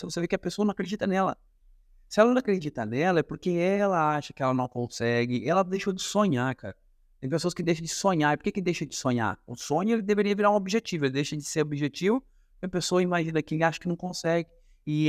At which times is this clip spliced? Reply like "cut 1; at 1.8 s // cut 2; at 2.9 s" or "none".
none